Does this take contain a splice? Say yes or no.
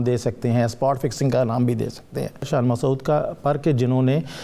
yes